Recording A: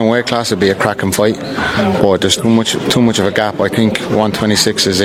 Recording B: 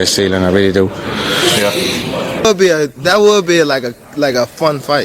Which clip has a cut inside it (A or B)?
B